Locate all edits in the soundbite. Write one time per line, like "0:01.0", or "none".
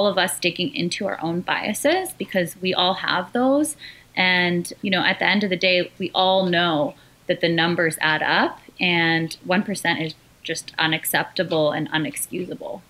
0:04.7
0:06.0